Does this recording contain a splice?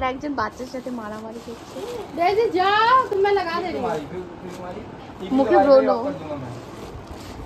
no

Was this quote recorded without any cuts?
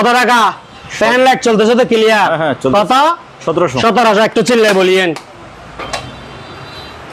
yes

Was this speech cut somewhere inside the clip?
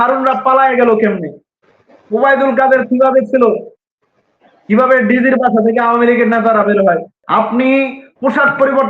yes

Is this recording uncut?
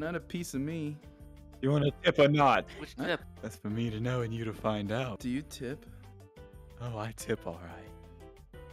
no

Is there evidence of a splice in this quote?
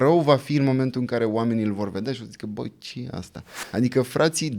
yes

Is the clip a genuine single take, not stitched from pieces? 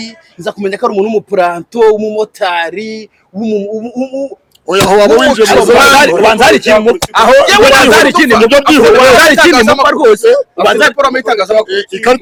yes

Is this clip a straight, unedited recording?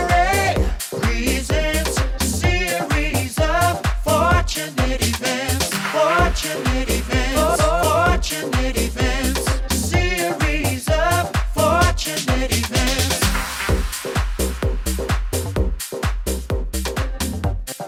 yes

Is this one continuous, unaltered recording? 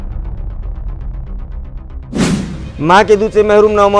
no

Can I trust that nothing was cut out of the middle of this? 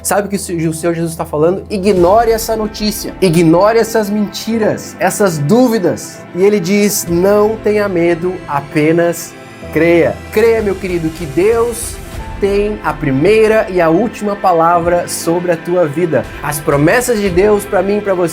no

